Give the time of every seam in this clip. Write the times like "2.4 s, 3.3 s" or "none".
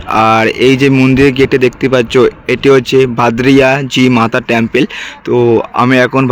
none